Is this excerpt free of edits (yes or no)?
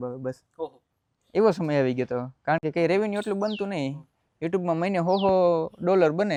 yes